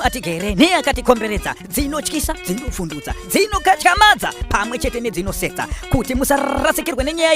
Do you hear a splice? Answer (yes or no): no